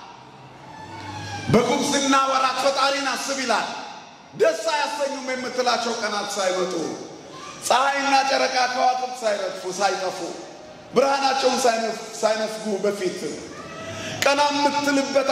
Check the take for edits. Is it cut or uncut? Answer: uncut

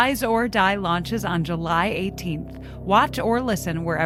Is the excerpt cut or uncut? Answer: uncut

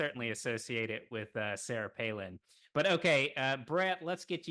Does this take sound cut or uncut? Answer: uncut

